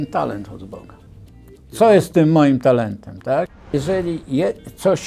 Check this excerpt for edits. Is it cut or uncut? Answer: cut